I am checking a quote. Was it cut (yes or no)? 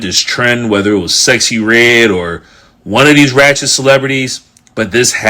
no